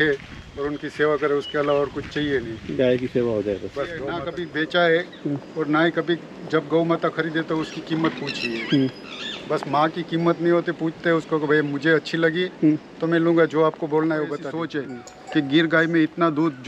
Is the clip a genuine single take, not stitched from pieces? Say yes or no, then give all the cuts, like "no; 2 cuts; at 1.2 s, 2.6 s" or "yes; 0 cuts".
no; 2 cuts; at 4.3 s, 14.7 s